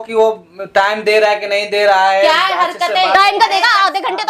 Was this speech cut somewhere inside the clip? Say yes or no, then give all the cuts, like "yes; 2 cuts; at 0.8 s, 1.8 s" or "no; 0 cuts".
no; 0 cuts